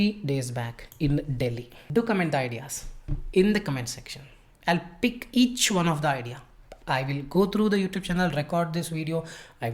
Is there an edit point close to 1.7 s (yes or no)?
yes